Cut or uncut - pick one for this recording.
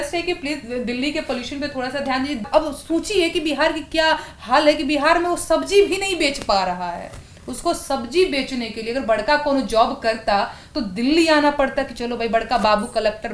cut